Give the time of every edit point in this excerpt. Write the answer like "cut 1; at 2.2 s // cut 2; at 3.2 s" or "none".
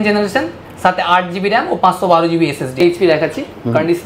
cut 1; at 2.7 s